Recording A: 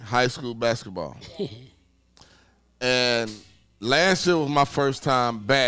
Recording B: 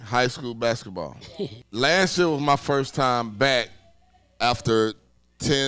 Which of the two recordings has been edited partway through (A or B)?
B